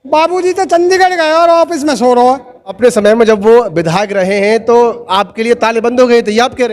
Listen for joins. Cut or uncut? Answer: cut